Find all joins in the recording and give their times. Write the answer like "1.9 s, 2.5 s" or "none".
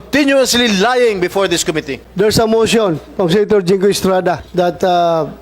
2.0 s, 4.4 s